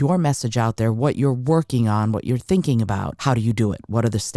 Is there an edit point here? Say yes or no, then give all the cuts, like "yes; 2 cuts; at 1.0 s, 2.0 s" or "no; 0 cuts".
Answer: yes; 1 cut; at 3.1 s